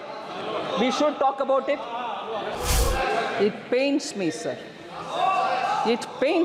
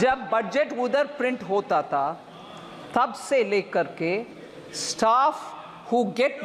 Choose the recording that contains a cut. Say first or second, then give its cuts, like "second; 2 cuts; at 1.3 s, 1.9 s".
first; 1 cut; at 2.5 s